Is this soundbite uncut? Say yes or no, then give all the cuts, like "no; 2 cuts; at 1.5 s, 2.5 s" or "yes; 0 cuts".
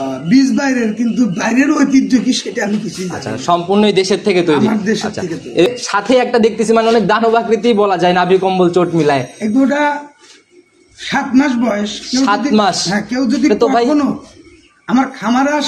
no; 1 cut; at 5.7 s